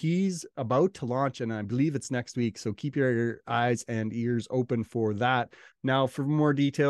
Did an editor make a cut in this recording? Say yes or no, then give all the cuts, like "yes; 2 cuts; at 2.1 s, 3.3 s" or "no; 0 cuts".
yes; 1 cut; at 5.6 s